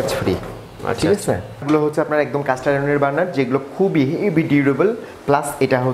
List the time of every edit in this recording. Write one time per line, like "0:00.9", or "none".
0:01.6